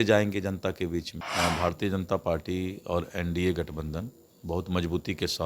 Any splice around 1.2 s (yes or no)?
yes